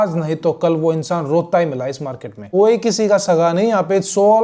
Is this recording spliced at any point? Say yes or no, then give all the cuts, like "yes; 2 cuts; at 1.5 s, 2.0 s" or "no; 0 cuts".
yes; 1 cut; at 2.4 s